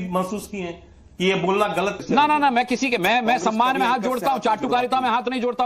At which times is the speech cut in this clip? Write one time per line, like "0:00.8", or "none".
0:02.0